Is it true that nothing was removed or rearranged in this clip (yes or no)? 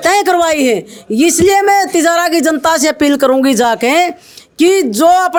yes